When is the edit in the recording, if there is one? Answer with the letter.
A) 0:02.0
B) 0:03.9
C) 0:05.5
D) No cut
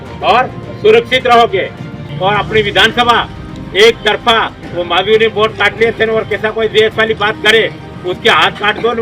A